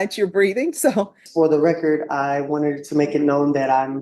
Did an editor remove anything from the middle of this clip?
yes; 1 cut; at 1.2 s

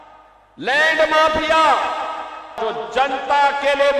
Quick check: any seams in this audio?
yes; 1 cut; at 2.6 s

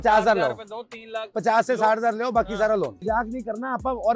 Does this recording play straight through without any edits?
no; 1 cut; at 3.0 s

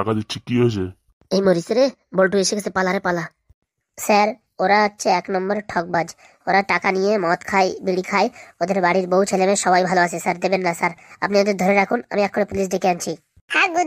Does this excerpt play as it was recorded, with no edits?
yes; 0 cuts

